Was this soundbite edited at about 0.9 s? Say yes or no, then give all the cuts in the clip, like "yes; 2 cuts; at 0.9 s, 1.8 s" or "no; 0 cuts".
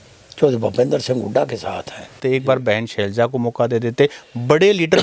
no; 1 cut; at 2.1 s